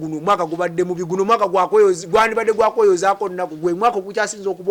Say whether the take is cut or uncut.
uncut